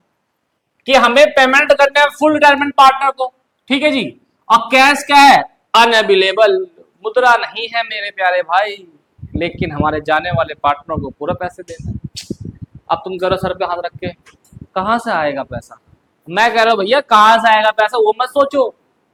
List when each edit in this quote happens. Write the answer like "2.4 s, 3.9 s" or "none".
none